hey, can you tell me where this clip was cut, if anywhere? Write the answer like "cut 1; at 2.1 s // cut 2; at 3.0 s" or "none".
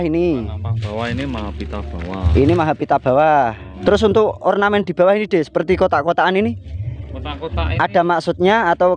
cut 1; at 3.7 s